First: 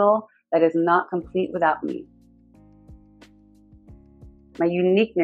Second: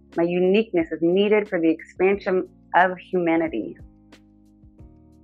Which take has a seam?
second; 1 cut; at 4.0 s

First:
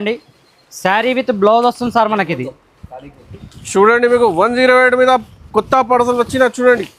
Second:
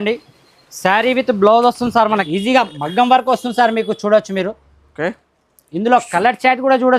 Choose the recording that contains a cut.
second; 1 cut; at 2.2 s

